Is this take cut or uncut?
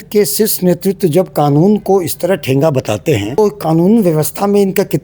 cut